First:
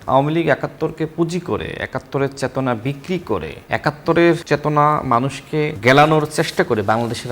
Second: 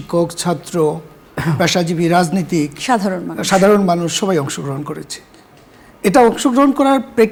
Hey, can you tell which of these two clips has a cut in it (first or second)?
first